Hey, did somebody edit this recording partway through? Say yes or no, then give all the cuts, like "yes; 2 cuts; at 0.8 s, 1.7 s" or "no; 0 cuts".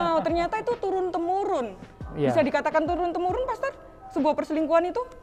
no; 0 cuts